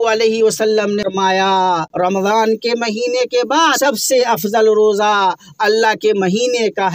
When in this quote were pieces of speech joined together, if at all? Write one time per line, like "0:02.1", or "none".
0:01.9
0:03.8